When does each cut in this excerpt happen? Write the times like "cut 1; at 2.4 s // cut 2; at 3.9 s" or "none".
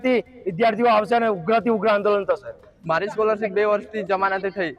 none